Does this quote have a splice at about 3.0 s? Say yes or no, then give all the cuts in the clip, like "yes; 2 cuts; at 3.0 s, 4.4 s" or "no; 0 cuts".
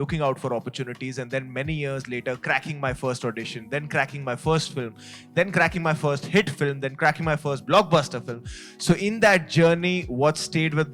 no; 0 cuts